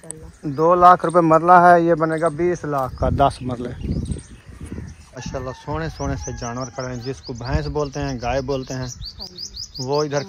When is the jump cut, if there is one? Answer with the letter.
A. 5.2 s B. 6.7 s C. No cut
A